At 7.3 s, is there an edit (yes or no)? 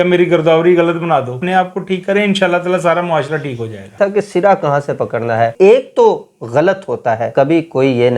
yes